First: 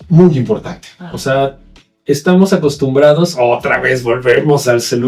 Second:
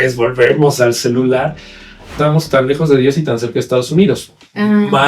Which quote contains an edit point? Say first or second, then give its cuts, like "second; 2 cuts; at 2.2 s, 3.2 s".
second; 1 cut; at 2.1 s